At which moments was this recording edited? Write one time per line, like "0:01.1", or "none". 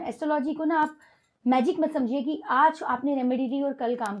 none